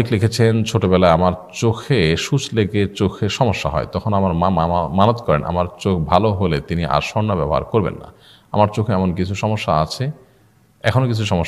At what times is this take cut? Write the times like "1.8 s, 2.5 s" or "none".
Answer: none